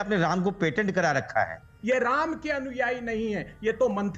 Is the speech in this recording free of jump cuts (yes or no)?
no